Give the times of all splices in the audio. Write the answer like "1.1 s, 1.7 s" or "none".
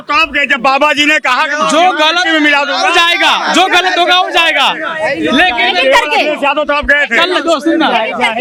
none